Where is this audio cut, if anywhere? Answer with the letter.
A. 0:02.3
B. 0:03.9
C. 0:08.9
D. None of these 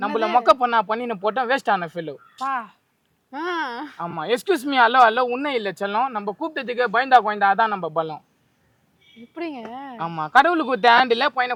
D